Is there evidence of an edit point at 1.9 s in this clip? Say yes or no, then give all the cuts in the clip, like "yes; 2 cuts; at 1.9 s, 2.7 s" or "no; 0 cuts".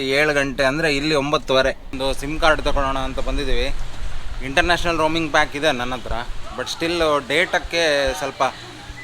yes; 1 cut; at 1.9 s